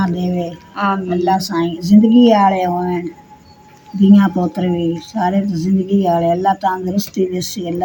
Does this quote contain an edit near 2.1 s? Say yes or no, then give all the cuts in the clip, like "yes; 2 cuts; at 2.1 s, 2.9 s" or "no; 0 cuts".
no; 0 cuts